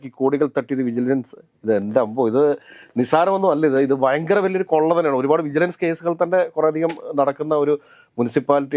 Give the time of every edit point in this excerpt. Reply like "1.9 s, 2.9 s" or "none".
none

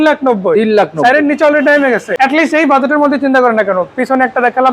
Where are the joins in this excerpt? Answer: 2.1 s

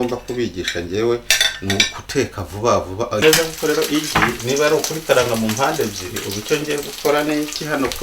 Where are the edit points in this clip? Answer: 3.2 s

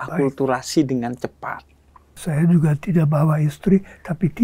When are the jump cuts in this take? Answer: 2.2 s

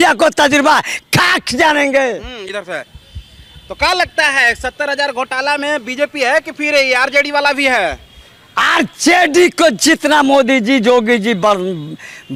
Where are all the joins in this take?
none

